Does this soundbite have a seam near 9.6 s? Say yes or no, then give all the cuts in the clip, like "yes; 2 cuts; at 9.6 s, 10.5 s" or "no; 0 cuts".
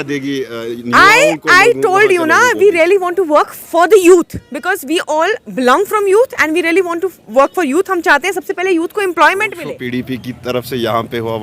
yes; 1 cut; at 9.6 s